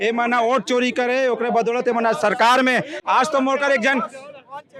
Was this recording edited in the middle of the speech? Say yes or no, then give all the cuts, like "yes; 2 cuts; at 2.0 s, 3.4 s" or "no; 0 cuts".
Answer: no; 0 cuts